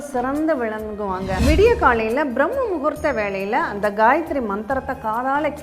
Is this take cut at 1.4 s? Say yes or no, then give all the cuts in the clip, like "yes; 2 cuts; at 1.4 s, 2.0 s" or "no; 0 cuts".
yes; 1 cut; at 1.4 s